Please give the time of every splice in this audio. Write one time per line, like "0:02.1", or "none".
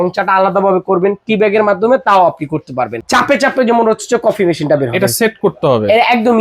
0:03.0